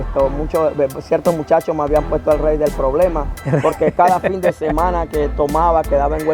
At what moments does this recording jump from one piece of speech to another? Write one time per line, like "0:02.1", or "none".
none